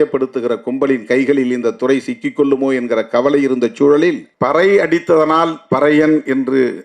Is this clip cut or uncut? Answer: cut